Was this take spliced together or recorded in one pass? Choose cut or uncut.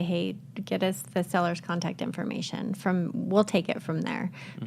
uncut